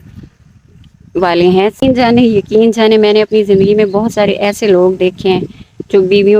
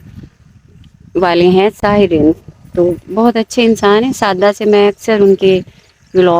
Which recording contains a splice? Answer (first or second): first